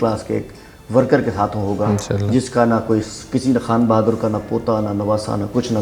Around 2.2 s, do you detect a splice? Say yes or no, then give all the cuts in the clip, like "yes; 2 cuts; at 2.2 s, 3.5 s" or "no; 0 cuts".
no; 0 cuts